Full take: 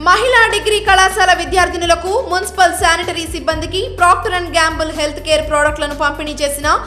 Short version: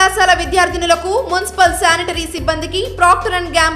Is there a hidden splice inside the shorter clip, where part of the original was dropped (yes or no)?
no